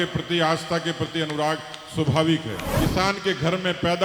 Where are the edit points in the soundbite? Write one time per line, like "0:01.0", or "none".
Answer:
0:02.7